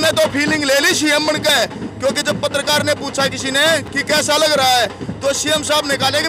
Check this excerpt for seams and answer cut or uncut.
uncut